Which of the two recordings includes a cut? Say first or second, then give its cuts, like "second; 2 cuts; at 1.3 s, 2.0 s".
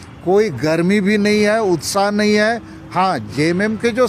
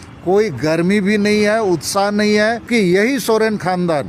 second; 1 cut; at 2.7 s